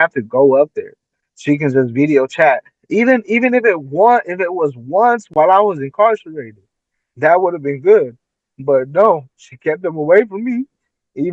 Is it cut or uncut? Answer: uncut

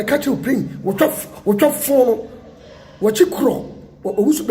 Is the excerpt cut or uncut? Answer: uncut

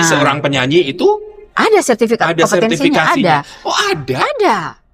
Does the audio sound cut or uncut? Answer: uncut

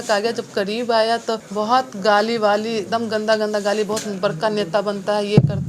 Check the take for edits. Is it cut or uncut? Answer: cut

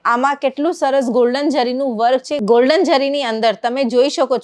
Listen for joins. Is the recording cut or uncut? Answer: cut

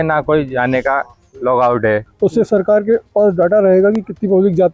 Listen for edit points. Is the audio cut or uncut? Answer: cut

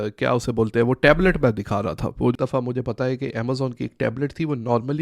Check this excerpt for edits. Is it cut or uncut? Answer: cut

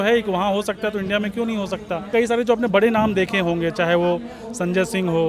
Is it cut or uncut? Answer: cut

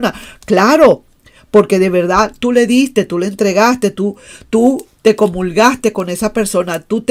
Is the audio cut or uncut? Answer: uncut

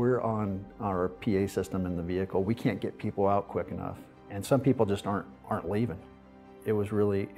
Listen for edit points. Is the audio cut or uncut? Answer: cut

